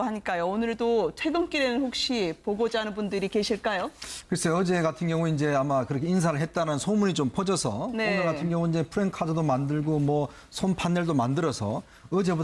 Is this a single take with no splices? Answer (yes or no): yes